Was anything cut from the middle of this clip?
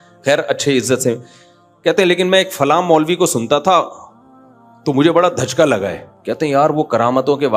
yes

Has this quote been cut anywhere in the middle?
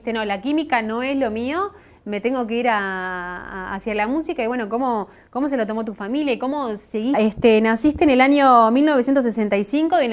no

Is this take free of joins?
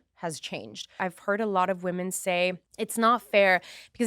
no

